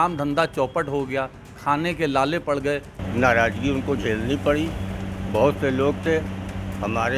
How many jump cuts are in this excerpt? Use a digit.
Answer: 1